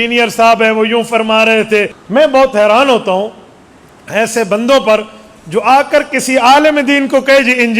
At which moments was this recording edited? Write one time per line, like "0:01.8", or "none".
0:02.0

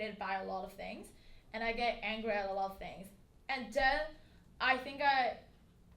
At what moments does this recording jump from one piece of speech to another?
none

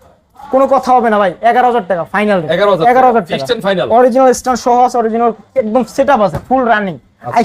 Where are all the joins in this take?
none

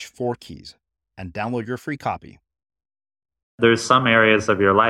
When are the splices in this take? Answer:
0:03.5

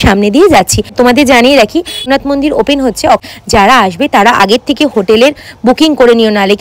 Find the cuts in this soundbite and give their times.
0:00.9
0:02.1
0:03.3

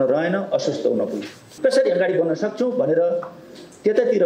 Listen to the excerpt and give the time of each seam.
0:01.5

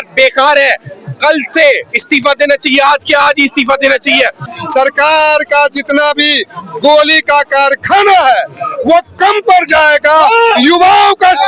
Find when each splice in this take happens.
0:04.5

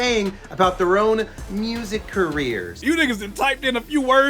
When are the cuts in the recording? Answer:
0:02.7

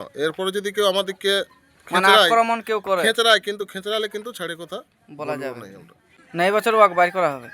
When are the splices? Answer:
0:06.1

